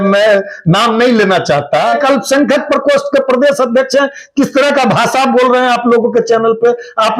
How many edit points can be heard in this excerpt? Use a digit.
1